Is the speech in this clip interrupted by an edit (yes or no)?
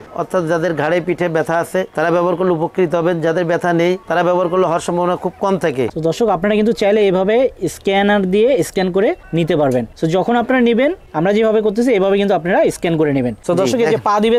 yes